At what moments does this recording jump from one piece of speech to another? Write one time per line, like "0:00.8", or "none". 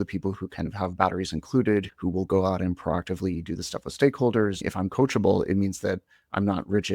0:01.9
0:04.6